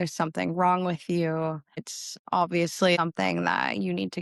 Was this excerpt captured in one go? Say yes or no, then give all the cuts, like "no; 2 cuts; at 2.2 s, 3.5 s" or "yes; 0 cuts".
no; 1 cut; at 3.0 s